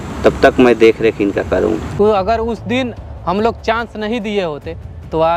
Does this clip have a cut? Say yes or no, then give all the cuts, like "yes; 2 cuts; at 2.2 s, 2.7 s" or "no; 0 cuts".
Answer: yes; 1 cut; at 1.8 s